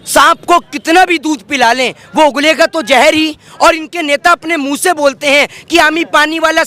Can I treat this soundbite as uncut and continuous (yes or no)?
yes